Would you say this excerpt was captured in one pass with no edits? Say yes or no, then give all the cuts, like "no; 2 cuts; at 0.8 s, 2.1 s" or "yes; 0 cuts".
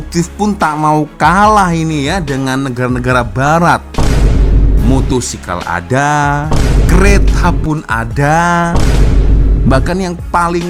yes; 0 cuts